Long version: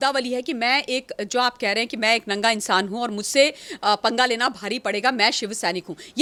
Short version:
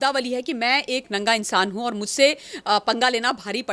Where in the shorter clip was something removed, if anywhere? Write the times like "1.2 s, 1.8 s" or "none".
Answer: 1.1 s

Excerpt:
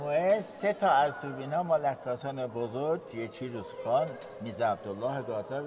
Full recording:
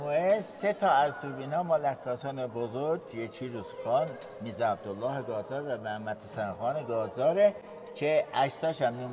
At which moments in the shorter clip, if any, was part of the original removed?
none

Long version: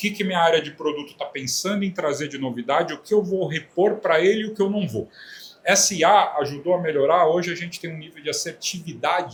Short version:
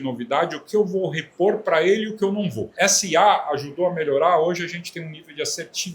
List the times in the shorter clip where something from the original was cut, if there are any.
2.6 s

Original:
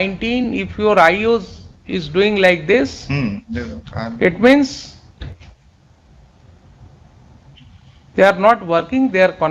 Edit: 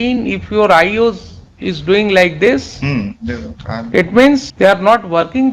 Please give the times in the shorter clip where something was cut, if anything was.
4.5 s

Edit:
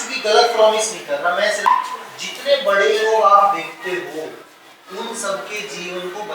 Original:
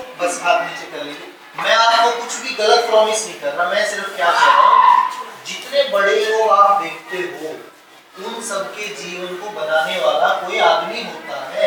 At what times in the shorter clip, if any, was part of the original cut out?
1.7 s

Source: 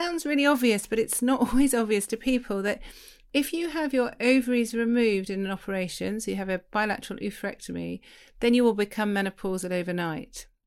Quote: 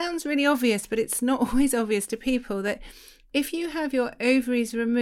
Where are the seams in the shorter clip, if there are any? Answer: none

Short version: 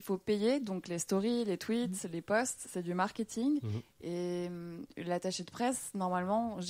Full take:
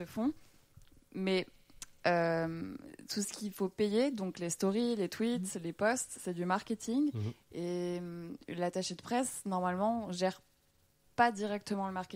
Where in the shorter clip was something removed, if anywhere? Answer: none

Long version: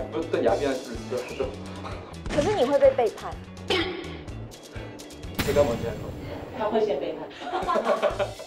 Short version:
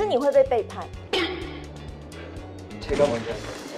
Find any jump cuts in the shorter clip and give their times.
0.9 s

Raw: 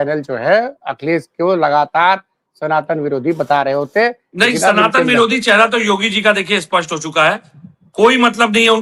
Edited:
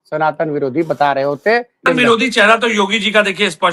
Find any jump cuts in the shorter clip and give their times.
1.8 s

